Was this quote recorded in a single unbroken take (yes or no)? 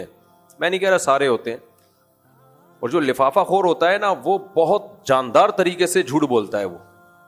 yes